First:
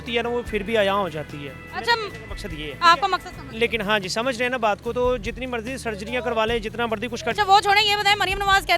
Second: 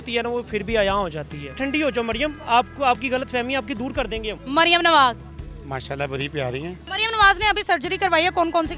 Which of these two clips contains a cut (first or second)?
second